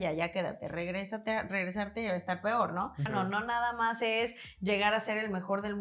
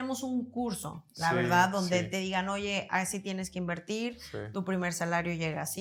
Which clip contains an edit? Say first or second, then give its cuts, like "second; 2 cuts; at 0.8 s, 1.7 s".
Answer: first; 1 cut; at 3.1 s